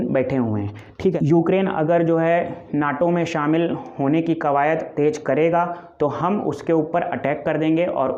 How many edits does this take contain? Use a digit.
1